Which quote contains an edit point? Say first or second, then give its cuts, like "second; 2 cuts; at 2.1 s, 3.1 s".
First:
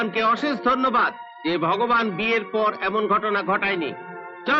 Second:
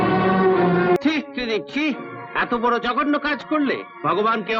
second; 1 cut; at 1.0 s